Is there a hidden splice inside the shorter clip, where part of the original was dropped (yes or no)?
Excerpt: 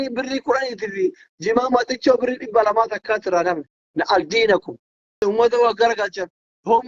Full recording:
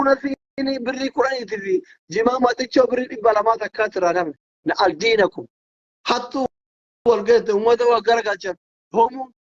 yes